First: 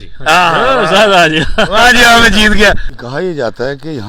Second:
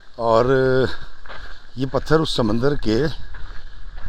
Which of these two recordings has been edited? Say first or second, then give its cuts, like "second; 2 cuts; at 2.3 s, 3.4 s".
first; 1 cut; at 2.9 s